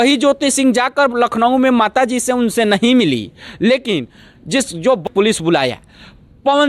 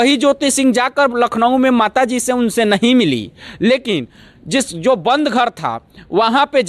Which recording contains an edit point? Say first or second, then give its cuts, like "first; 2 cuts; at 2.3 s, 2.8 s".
first; 1 cut; at 5.1 s